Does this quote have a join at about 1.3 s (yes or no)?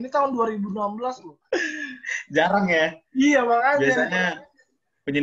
yes